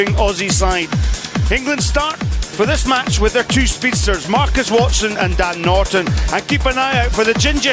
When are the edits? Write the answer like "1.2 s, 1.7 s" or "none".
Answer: 2.6 s